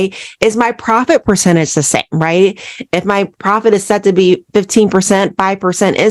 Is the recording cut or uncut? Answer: uncut